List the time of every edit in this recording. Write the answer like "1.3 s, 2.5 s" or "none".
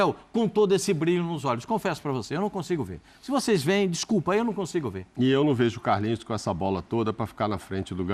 none